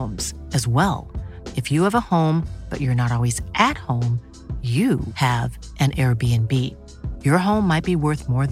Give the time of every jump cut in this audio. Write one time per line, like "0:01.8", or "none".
none